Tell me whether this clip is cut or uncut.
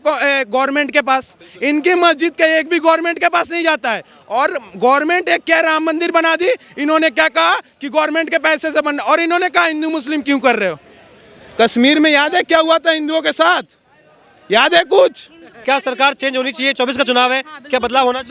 cut